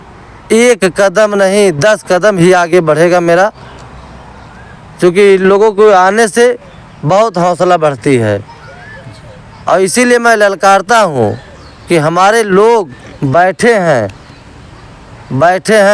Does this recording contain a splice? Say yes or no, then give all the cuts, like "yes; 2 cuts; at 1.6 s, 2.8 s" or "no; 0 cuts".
no; 0 cuts